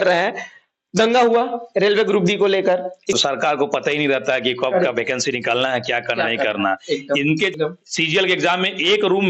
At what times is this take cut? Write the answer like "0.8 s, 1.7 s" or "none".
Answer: 3.2 s, 7.5 s